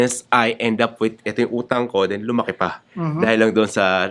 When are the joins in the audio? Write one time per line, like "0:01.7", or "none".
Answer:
none

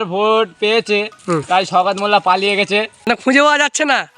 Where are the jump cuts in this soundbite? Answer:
0:01.1
0:03.1

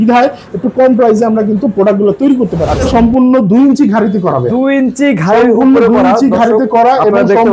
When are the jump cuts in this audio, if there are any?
0:02.9

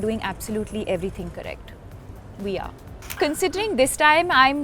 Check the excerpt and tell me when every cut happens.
0:03.2

